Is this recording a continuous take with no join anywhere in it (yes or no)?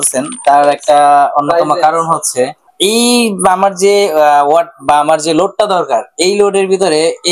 no